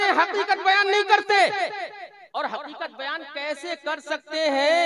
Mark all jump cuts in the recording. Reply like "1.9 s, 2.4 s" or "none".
2.1 s